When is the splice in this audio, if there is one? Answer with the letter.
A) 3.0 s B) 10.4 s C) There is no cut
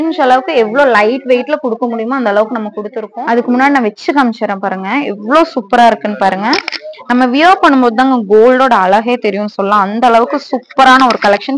A